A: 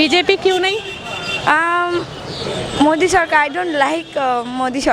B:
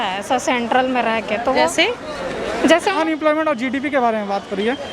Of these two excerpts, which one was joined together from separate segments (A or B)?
B